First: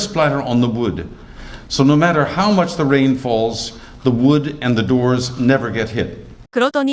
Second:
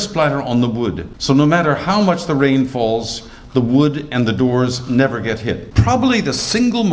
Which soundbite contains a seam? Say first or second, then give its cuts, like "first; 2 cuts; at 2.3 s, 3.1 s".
second; 2 cuts; at 1.1 s, 5.7 s